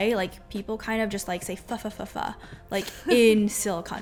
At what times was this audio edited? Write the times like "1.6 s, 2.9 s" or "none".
none